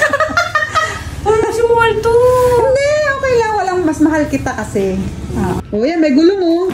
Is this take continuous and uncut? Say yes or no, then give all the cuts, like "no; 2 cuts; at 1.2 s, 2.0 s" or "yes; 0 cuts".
no; 1 cut; at 5.6 s